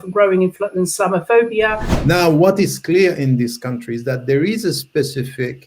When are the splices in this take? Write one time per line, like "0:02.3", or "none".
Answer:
0:01.9